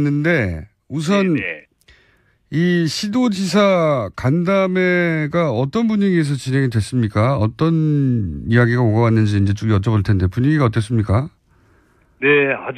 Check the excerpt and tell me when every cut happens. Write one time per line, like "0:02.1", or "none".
0:02.7